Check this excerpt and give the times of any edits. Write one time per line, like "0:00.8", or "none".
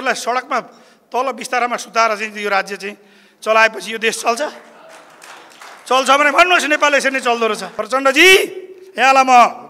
0:07.7